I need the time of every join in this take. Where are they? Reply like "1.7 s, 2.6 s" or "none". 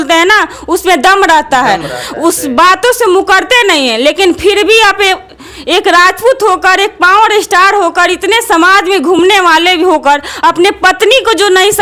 none

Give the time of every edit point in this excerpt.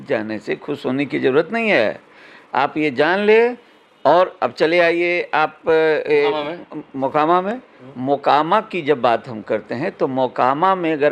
none

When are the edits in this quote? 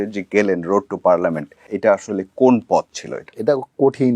1.6 s

